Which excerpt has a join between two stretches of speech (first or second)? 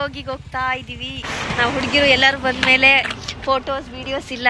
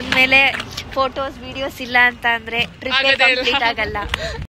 first